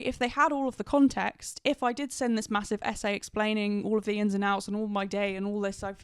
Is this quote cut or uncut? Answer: uncut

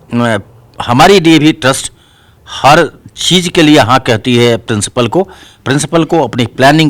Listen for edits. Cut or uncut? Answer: uncut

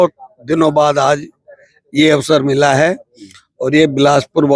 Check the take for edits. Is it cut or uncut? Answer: uncut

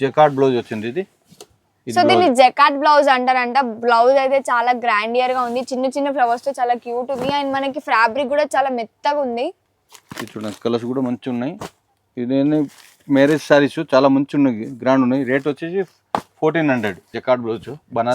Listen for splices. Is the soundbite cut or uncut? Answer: cut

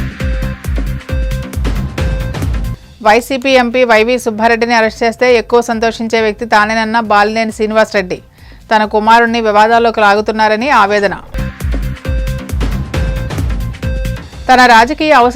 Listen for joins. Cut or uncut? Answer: cut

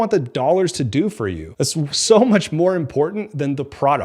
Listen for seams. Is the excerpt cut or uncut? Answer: cut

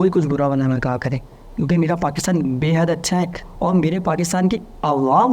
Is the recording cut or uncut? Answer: uncut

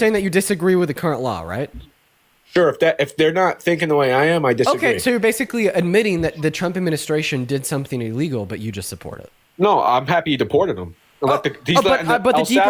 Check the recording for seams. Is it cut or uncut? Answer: uncut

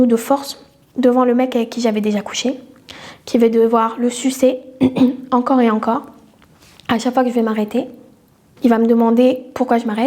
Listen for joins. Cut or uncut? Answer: uncut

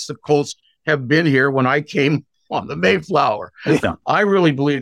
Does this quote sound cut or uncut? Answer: cut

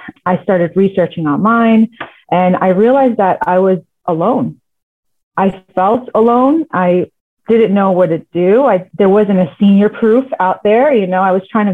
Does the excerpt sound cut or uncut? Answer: cut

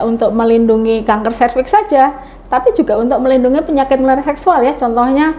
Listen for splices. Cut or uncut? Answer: uncut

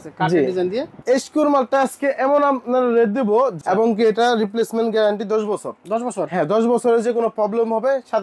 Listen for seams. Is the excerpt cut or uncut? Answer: cut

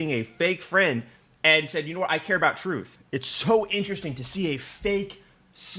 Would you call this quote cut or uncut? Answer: cut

